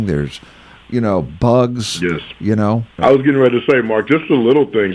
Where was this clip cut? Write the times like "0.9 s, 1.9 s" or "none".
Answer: 2.9 s